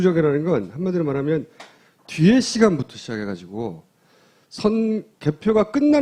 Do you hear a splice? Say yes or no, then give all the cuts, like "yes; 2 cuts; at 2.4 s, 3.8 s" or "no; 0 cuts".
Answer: no; 0 cuts